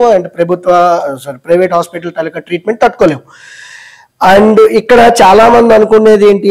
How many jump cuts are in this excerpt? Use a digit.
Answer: 0